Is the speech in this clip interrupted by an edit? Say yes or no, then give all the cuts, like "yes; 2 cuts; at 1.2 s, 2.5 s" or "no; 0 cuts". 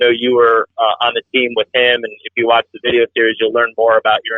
no; 0 cuts